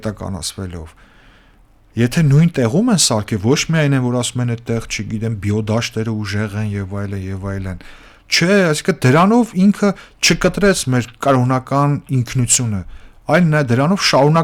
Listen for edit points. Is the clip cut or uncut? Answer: uncut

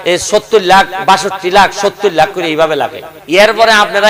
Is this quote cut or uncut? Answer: cut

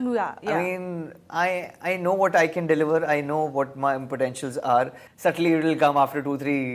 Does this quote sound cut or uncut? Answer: cut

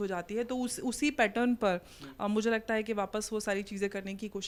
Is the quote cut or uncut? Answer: uncut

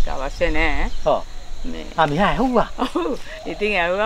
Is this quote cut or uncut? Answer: uncut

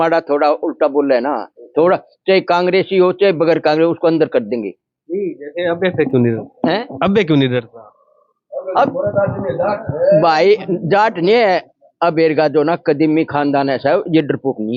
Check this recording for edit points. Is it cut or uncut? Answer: uncut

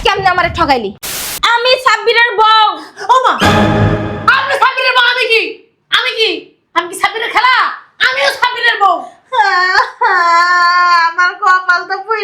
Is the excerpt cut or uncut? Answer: cut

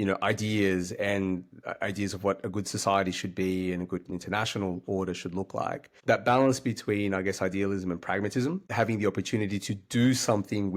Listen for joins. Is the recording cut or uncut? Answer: cut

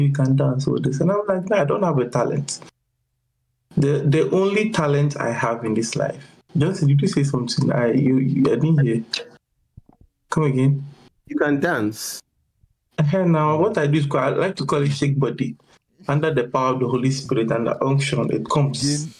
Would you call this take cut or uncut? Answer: uncut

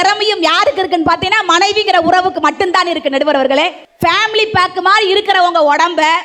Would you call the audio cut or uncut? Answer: cut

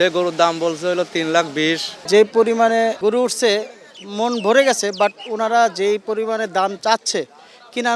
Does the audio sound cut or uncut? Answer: cut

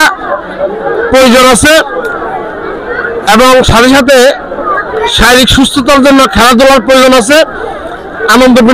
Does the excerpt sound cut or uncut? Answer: uncut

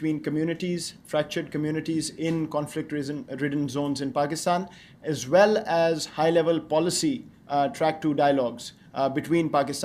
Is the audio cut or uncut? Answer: uncut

